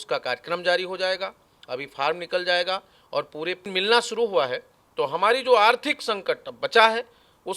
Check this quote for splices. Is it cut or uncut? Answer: cut